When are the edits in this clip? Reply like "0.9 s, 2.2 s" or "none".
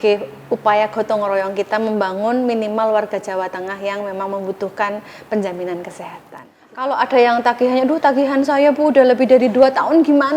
6.9 s